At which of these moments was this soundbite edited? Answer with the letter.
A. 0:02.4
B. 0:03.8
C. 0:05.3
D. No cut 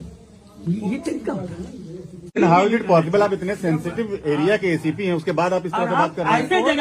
A